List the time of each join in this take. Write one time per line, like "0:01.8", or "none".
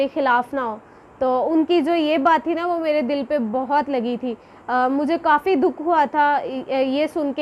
none